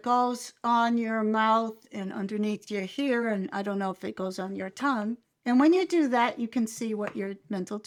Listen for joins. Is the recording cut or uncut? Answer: uncut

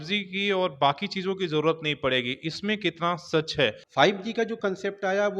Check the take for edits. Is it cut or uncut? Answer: cut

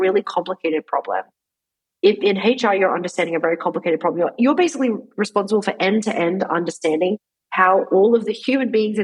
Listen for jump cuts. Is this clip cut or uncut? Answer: uncut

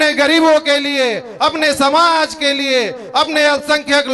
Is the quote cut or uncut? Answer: uncut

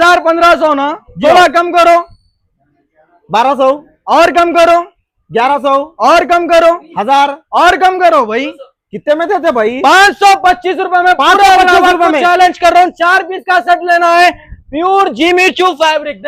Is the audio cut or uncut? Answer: uncut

